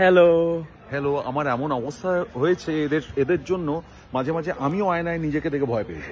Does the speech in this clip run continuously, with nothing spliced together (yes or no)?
yes